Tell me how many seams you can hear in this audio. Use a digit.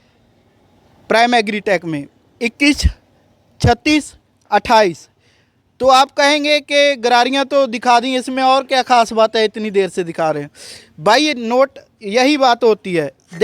0